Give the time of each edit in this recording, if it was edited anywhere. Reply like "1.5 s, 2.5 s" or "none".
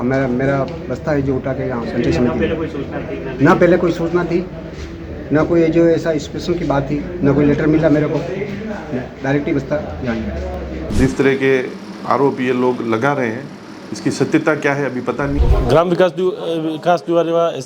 10.9 s, 15.4 s